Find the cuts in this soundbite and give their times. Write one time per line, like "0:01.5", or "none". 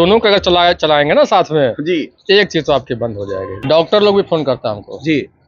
0:03.5